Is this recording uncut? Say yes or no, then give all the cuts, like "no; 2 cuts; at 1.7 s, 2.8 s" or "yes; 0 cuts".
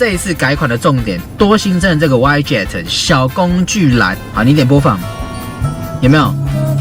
no; 1 cut; at 4.2 s